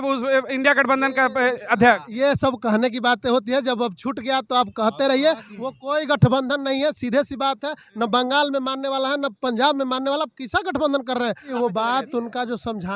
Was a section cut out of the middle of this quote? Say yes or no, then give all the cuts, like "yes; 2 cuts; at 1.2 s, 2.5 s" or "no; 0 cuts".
yes; 1 cut; at 11.5 s